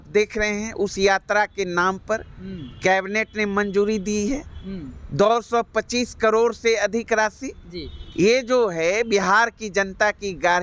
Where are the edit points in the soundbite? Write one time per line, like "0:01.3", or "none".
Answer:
none